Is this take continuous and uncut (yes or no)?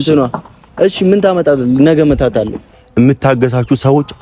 no